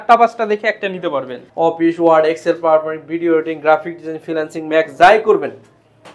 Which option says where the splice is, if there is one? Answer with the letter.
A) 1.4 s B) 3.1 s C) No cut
A